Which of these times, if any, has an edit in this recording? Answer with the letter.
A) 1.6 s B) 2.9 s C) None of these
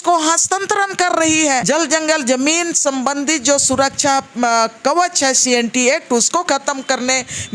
A